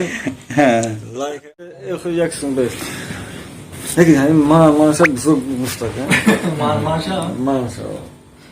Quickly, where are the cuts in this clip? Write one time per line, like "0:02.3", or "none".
0:01.8